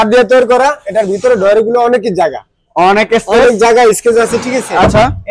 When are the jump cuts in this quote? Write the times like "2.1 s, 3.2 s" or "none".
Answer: none